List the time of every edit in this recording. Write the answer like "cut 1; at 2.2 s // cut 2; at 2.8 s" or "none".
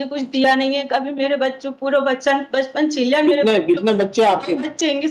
none